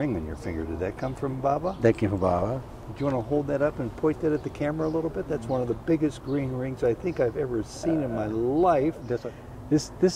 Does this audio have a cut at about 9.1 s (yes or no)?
yes